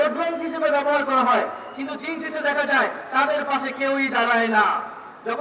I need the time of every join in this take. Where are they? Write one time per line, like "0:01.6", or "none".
none